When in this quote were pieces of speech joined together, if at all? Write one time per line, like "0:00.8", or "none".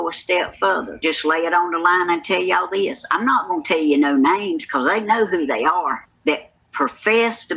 0:00.9
0:06.2